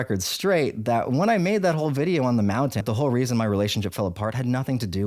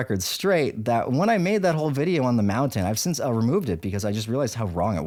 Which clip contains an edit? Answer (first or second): first